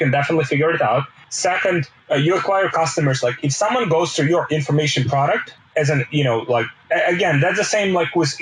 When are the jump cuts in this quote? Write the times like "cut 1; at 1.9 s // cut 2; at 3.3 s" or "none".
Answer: cut 1; at 1.6 s // cut 2; at 5.6 s // cut 3; at 6.8 s